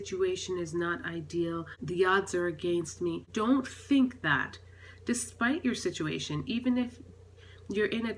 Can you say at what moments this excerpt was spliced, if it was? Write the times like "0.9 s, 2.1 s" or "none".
1.7 s, 3.2 s